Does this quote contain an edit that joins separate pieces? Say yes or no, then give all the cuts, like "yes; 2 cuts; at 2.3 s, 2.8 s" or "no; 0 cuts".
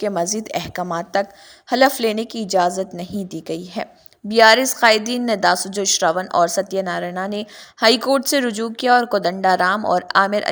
no; 0 cuts